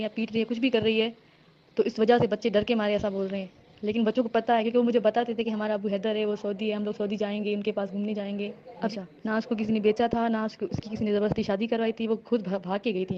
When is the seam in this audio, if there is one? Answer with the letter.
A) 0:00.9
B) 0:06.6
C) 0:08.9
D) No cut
C